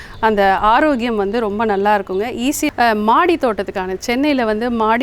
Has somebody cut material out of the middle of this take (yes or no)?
yes